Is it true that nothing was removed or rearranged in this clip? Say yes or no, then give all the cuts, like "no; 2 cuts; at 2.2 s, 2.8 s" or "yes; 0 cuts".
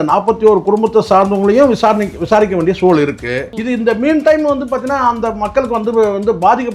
no; 1 cut; at 3.5 s